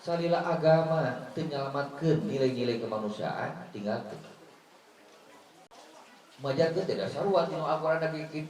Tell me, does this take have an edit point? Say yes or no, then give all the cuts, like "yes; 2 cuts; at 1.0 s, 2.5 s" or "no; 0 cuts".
yes; 1 cut; at 5.6 s